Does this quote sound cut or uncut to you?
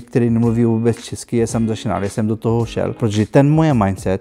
cut